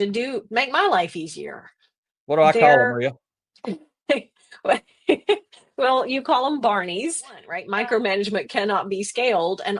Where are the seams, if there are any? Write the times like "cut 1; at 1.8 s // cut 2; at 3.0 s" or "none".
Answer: cut 1; at 7.6 s

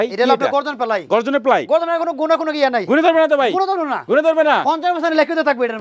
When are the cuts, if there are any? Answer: none

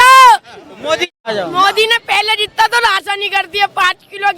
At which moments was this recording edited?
cut 1; at 1.1 s

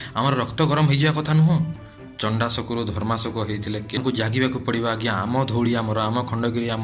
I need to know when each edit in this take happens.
cut 1; at 1.9 s // cut 2; at 4.0 s

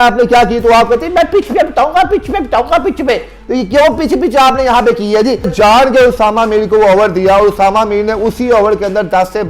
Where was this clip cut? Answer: cut 1; at 5.5 s

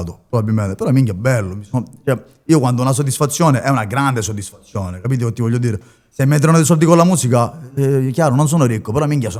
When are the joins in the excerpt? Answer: none

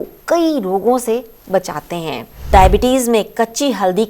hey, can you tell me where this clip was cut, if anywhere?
cut 1; at 2.5 s

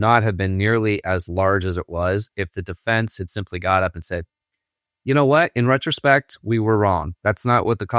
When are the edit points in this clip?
none

